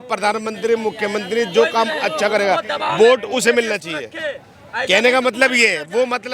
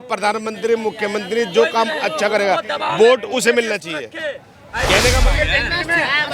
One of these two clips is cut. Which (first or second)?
second